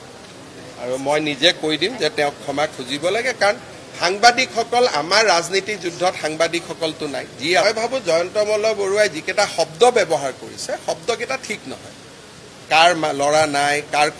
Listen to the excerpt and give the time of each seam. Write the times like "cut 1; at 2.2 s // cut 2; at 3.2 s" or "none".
cut 1; at 7.6 s